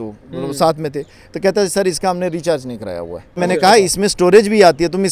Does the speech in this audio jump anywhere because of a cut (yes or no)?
yes